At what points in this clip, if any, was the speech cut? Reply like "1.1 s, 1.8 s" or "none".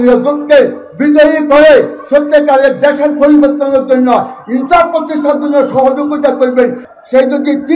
6.8 s